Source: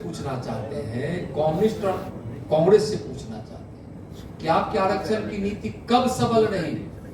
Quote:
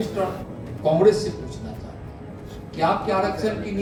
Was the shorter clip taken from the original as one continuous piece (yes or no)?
yes